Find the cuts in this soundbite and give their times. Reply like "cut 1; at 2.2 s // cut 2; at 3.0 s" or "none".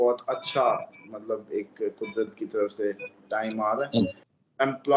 cut 1; at 4.0 s

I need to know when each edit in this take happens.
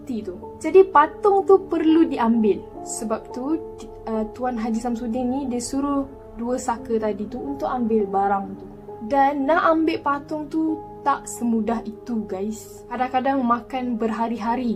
none

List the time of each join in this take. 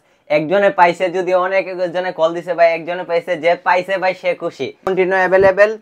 cut 1; at 4.8 s

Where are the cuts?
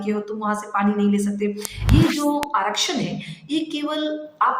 cut 1; at 1.7 s

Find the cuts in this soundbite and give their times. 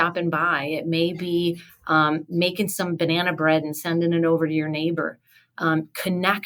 none

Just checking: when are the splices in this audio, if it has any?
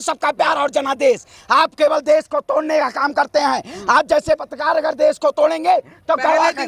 none

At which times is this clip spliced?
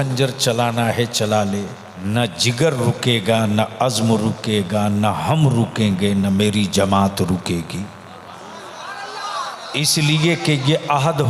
cut 1; at 1.9 s

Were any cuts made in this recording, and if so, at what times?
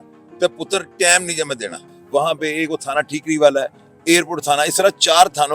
cut 1; at 1.9 s

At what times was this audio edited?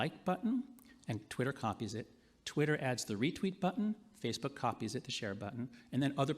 cut 1; at 3.3 s

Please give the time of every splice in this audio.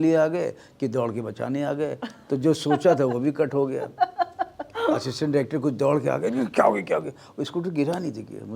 none

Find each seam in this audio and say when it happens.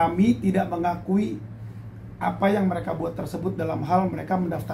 none

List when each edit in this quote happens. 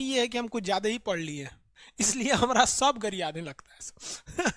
cut 1; at 1.8 s

